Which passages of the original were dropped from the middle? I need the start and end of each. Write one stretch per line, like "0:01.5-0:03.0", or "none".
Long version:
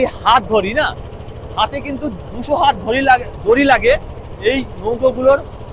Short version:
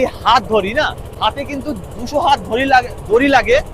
0:01.0-0:01.4